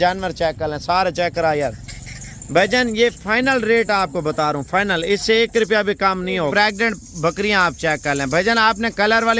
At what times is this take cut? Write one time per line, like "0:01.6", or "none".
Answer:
0:06.5